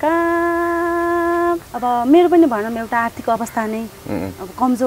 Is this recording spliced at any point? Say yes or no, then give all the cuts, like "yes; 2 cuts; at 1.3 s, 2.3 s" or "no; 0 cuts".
yes; 1 cut; at 1.7 s